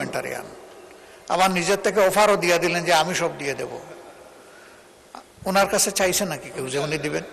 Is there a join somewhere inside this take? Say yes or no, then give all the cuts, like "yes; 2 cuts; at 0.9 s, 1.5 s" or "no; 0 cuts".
no; 0 cuts